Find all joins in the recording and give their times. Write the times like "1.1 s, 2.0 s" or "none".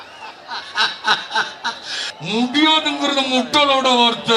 2.0 s